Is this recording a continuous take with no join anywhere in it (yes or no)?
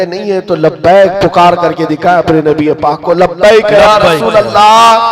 yes